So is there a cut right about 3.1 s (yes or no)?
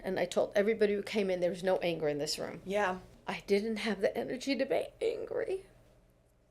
yes